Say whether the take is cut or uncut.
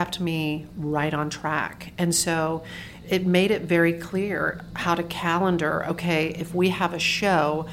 cut